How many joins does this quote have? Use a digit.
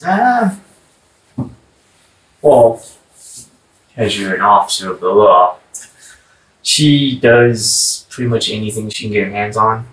1